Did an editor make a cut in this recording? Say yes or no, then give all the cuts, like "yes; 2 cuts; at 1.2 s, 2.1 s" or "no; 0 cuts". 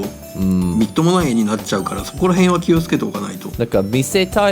yes; 1 cut; at 3.4 s